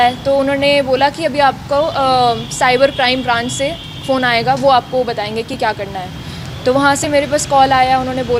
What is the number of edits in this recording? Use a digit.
0